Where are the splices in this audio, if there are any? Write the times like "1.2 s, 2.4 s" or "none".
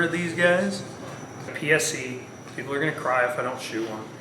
1.5 s